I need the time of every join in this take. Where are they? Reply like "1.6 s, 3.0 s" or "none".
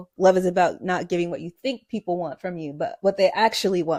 none